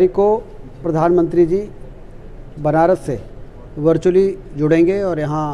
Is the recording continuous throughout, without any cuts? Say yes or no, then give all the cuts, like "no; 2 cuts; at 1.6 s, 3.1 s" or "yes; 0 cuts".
yes; 0 cuts